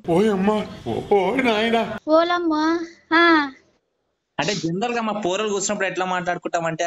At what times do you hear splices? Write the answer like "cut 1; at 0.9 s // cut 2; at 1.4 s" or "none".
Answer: cut 1; at 2.0 s